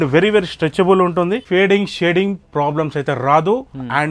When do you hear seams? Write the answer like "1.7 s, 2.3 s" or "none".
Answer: 1.4 s